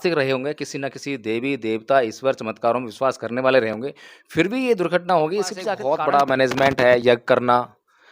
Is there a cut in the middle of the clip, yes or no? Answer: yes